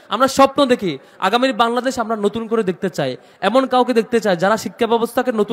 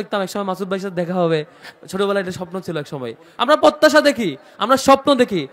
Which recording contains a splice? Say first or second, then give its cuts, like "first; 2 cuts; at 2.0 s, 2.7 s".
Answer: second; 1 cut; at 3.2 s